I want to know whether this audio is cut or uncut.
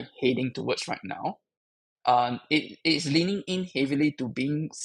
uncut